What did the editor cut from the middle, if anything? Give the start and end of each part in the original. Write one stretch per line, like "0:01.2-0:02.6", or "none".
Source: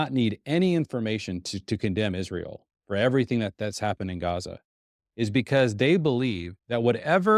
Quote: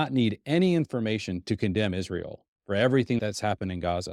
0:01.4-0:01.6
0:03.4-0:03.6